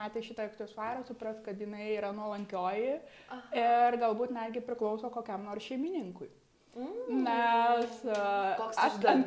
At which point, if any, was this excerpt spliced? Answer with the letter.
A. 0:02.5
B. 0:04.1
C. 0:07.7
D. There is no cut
D